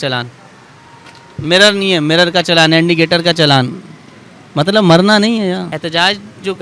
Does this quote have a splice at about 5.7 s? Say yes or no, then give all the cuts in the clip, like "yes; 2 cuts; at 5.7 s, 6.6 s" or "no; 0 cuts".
yes; 1 cut; at 5.7 s